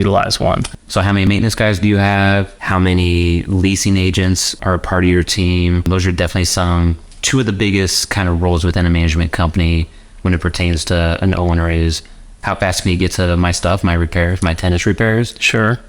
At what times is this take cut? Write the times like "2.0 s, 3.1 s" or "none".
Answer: 1.3 s, 2.6 s, 4.6 s, 5.9 s